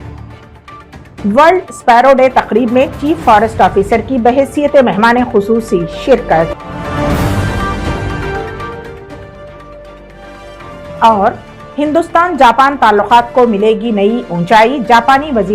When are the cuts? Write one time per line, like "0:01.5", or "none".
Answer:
0:01.1